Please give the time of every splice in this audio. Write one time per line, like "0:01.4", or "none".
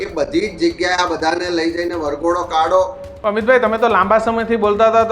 0:03.0

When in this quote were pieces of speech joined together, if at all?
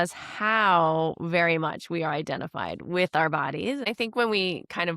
0:03.9

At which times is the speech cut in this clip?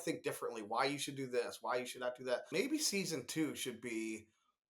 0:02.5

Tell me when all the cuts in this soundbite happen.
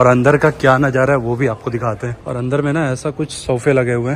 0:02.2

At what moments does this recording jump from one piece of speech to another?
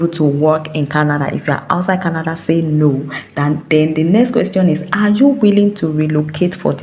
none

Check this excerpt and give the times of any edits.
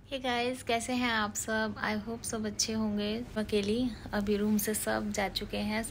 0:03.4

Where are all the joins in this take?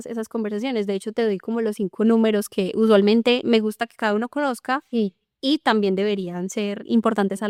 none

